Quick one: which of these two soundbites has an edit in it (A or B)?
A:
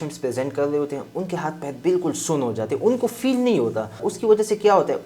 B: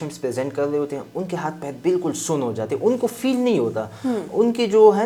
A